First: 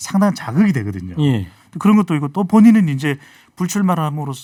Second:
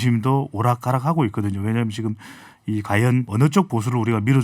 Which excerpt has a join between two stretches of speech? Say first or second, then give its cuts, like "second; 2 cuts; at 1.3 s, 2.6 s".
second; 1 cut; at 3.3 s